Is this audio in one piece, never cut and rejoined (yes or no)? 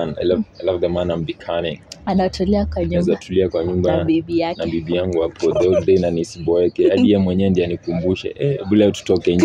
yes